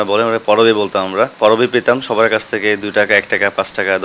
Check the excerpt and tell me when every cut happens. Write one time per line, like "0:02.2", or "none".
0:01.3

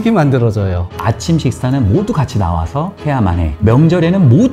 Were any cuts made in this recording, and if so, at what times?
0:01.0
0:03.6

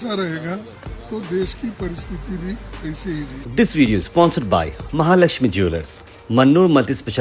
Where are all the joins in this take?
0:03.4

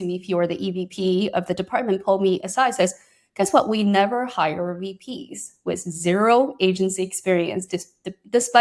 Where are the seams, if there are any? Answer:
none

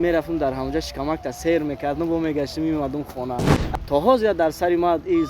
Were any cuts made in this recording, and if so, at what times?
0:03.6

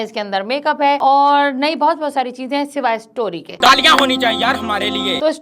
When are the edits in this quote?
none

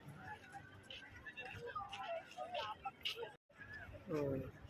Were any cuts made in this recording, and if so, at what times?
0:03.5

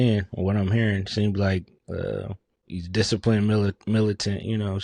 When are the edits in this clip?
none

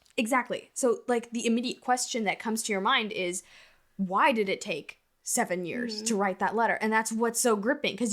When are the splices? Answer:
none

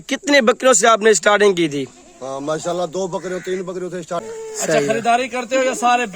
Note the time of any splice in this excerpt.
0:04.2

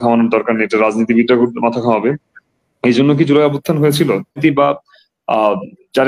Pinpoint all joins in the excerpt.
0:04.4

